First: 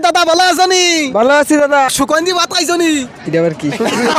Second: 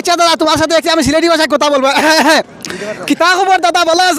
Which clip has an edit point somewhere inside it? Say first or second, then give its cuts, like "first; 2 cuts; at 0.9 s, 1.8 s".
first; 1 cut; at 1.9 s